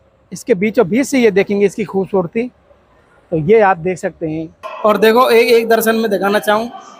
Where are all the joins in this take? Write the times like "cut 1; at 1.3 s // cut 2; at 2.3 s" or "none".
cut 1; at 4.6 s